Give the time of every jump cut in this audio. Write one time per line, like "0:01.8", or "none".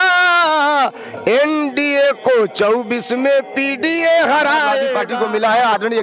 0:05.0